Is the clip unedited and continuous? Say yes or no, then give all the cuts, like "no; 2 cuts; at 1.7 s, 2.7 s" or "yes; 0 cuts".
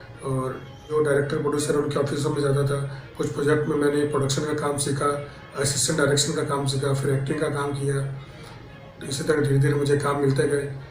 no; 1 cut; at 0.9 s